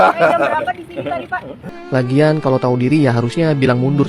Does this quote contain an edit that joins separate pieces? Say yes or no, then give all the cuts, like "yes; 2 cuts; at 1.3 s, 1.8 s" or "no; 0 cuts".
yes; 1 cut; at 1.5 s